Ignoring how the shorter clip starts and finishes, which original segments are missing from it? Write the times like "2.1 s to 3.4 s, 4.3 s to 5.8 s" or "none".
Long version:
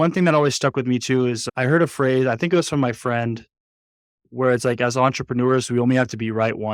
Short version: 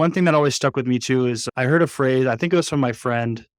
none